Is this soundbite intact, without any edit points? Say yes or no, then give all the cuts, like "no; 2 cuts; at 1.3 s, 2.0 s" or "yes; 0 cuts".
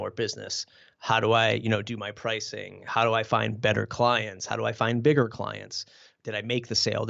yes; 0 cuts